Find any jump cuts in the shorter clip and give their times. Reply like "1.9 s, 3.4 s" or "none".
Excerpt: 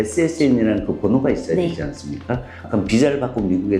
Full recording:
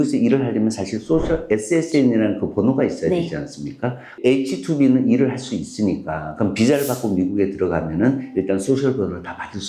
2.5 s